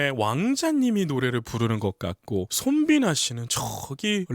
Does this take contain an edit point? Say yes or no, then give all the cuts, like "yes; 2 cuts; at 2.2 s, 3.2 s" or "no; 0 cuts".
yes; 1 cut; at 2.5 s